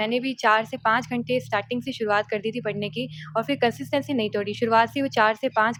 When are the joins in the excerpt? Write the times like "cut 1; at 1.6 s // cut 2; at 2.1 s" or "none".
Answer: none